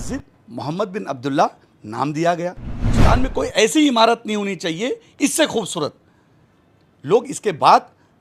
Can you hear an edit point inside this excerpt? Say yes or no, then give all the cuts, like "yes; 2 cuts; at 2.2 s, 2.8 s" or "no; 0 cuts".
yes; 1 cut; at 2.9 s